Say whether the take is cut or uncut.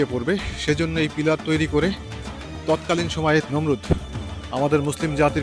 cut